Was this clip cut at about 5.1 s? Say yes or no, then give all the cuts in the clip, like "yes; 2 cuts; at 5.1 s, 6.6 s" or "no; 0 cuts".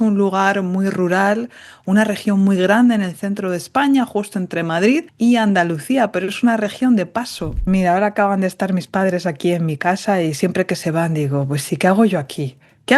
yes; 2 cuts; at 5.1 s, 7.6 s